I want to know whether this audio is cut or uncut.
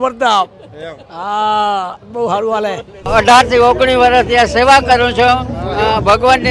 cut